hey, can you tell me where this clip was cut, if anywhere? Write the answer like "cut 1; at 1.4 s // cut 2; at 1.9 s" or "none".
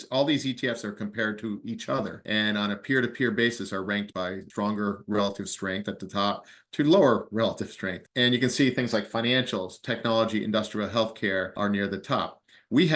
cut 1; at 4.1 s

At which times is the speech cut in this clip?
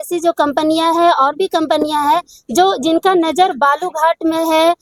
none

